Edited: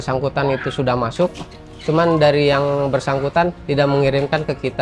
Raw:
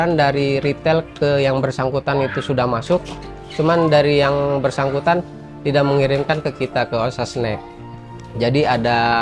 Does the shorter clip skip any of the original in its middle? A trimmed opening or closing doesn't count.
yes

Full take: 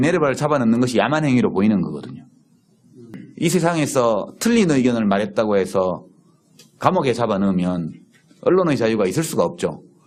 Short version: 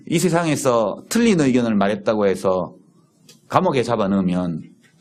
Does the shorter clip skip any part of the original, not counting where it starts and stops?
no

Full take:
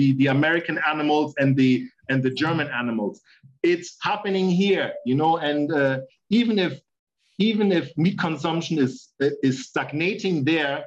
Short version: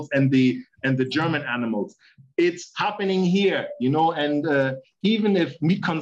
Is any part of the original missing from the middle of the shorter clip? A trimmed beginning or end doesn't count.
yes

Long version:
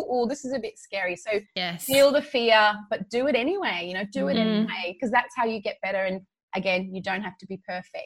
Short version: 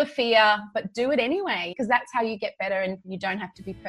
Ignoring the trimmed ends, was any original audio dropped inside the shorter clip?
yes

